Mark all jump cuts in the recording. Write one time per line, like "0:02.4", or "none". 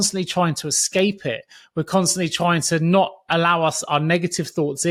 none